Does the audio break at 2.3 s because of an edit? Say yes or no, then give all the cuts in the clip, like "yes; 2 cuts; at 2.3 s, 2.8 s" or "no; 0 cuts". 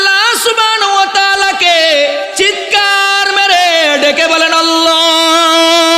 yes; 1 cut; at 2.3 s